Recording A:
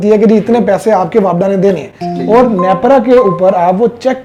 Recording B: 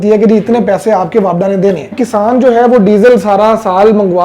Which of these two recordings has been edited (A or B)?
B